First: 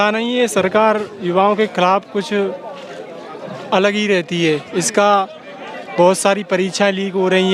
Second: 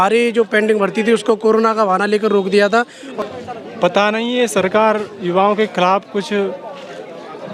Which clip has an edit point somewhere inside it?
second; 1 cut; at 3.0 s

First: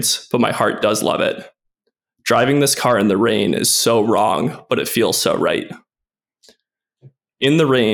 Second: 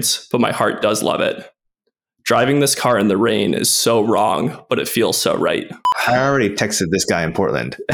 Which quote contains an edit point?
second; 1 cut; at 6.0 s

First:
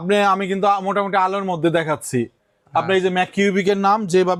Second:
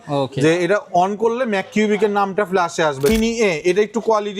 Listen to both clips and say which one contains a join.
second; 1 cut; at 3.1 s

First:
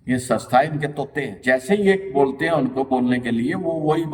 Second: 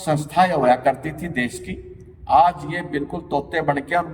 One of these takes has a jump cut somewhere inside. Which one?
first; 1 cut; at 1.2 s

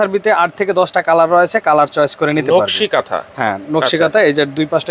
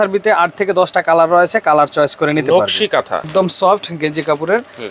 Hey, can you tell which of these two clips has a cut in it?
second; 1 cut; at 3.3 s

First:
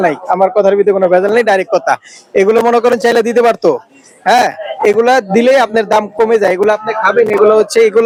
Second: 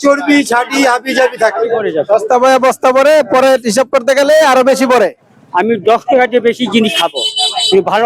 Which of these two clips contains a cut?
second; 1 cut; at 1.8 s

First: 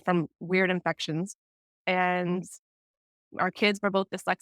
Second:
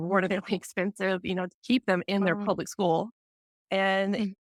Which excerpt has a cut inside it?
first; 1 cut; at 3.2 s

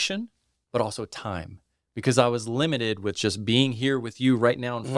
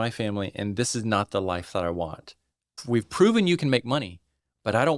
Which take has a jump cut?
second; 1 cut; at 2.7 s

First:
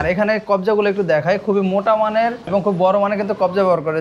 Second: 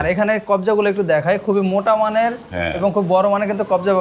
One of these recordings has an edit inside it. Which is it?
first; 1 cut; at 2.4 s

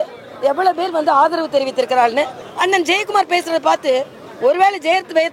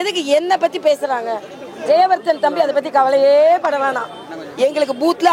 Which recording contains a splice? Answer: first; 1 cut; at 2.4 s

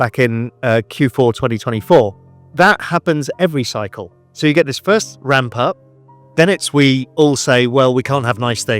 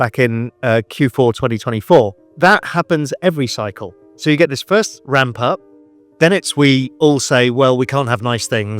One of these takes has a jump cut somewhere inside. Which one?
second; 1 cut; at 2.2 s

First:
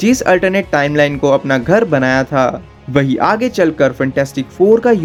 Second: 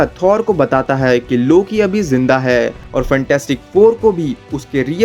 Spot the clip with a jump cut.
second; 1 cut; at 2.8 s

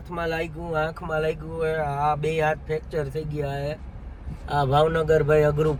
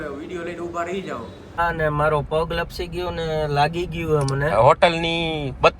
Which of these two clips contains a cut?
second; 1 cut; at 1.6 s

